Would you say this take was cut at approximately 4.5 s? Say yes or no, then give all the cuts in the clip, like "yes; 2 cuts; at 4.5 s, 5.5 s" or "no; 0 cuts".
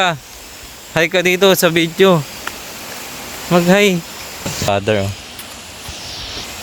yes; 1 cut; at 4.5 s